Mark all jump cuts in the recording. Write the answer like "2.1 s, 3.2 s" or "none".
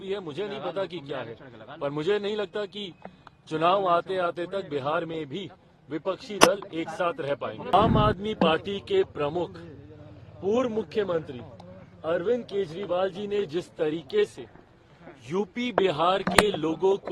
7.7 s